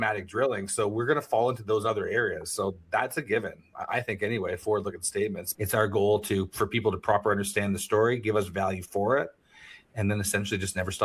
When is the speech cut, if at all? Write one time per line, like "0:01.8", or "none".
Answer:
0:05.5